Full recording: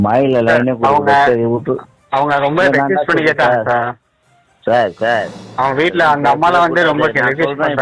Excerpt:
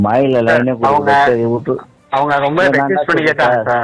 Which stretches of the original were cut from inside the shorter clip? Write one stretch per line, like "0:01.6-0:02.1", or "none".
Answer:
none